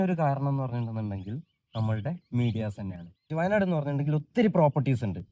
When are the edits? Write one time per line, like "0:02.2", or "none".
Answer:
0:03.3